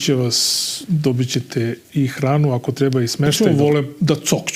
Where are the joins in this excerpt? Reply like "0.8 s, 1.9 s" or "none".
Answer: 3.3 s